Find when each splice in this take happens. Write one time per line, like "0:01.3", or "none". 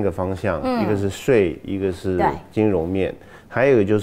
none